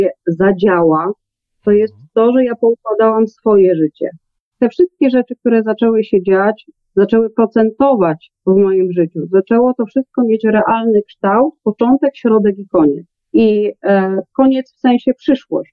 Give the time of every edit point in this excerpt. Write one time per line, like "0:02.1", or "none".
0:04.4
0:06.7
0:13.1